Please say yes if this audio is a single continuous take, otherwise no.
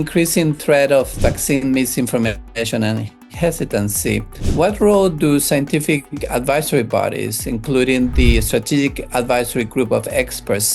no